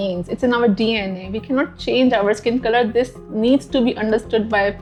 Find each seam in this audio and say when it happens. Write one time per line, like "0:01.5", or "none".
none